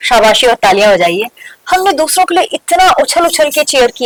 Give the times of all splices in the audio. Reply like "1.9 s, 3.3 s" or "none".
none

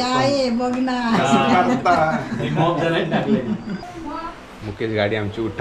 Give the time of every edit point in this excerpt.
3.7 s

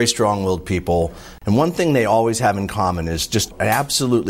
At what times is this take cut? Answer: 1.3 s

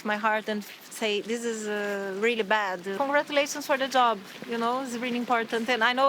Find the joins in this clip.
2.9 s

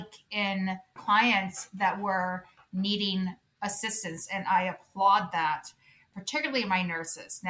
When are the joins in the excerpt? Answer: 0.9 s, 6.1 s

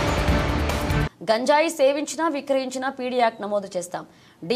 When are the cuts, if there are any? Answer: 1.0 s

